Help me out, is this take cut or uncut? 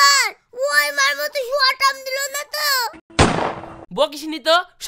uncut